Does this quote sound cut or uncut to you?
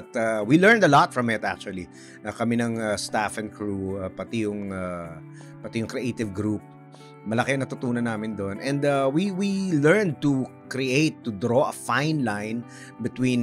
uncut